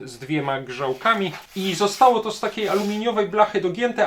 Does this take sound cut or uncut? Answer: cut